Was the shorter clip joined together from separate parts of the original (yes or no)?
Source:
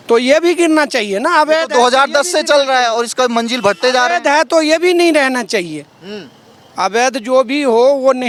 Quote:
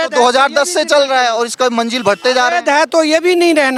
no